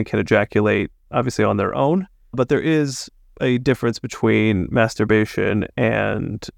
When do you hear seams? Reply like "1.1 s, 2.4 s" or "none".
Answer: 2.4 s